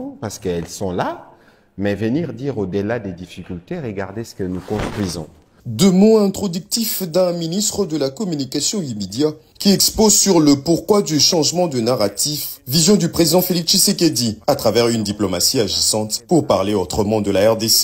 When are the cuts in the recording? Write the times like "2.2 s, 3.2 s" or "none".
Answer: none